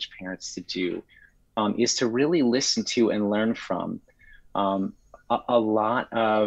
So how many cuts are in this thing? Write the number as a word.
zero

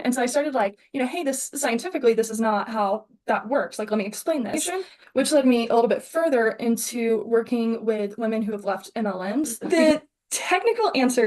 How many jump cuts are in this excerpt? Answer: two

